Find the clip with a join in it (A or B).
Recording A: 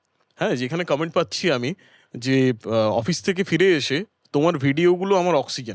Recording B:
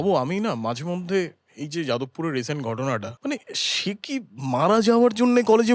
B